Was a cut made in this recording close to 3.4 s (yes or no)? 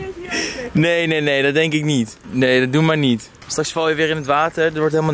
yes